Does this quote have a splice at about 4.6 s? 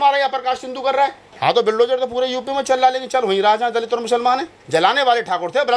yes; 2 cuts; at 1.3 s, 4.6 s

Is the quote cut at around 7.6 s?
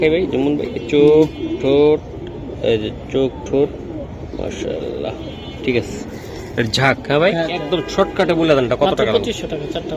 yes; 1 cut; at 7.6 s

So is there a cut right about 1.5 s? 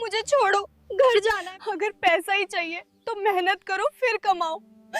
yes; 1 cut; at 1.5 s

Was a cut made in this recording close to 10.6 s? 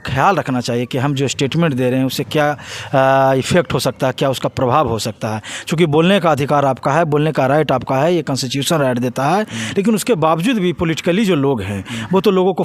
no; 0 cuts

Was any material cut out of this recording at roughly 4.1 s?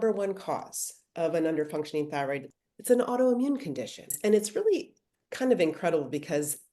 yes; 2 cuts; at 2.5 s, 4.1 s

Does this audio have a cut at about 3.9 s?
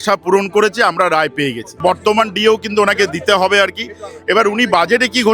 no; 1 cut; at 1.7 s

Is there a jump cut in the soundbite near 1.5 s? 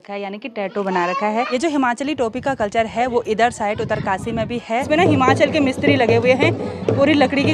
yes; 2 cuts; at 1.5 s, 4.8 s

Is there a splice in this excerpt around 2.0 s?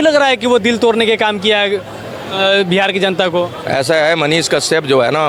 no; 0 cuts

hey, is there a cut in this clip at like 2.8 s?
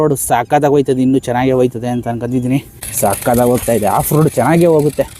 yes; 1 cut; at 2.8 s

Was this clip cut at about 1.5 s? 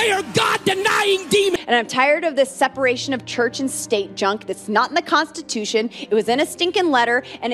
yes; 1 cut; at 1.5 s

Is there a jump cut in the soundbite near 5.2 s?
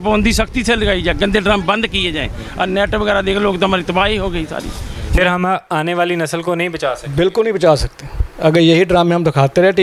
yes; 1 cut; at 5.2 s

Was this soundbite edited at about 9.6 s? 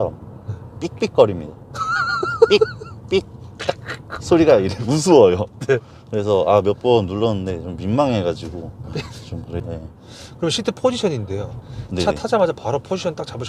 yes; 1 cut; at 9.6 s

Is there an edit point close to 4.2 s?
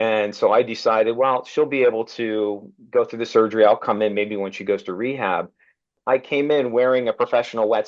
no; 1 cut; at 6.0 s

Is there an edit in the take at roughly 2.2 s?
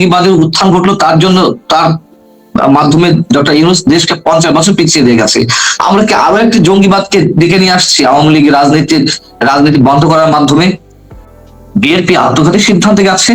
no; 1 cut; at 11.1 s

